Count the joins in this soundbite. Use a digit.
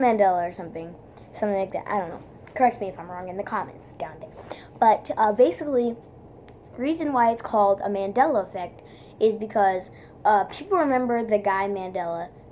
1